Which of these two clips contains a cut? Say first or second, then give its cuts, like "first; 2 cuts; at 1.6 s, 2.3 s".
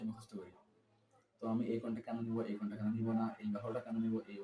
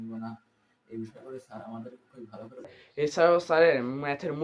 second; 1 cut; at 2.8 s